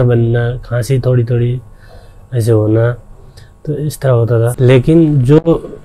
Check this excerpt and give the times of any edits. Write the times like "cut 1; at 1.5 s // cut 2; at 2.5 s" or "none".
cut 1; at 4.5 s